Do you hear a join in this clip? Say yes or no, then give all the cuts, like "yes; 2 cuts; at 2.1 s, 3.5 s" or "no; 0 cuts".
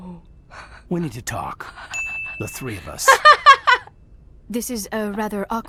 no; 0 cuts